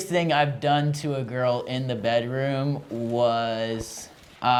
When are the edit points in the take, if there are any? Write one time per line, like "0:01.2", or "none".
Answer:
none